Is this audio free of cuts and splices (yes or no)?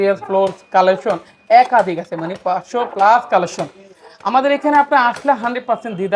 yes